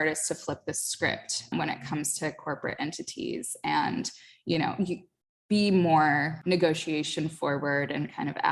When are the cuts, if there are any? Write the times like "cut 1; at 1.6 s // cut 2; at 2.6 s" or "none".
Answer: cut 1; at 1.5 s // cut 2; at 6.3 s